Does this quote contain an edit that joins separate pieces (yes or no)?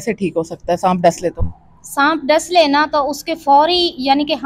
no